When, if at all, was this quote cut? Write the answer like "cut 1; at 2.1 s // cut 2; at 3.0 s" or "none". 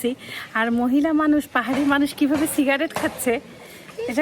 none